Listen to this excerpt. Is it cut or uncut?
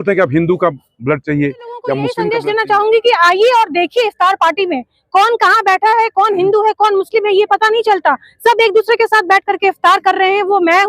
cut